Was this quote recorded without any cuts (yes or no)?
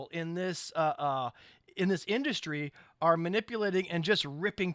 yes